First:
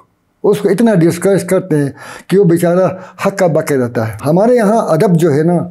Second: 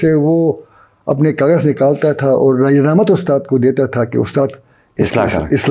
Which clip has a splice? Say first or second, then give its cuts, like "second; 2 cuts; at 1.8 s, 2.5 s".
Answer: first; 1 cut; at 4.2 s